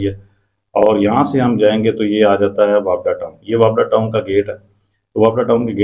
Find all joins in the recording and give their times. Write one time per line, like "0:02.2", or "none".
none